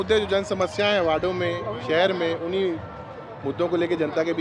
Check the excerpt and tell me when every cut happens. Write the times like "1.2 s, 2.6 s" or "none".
none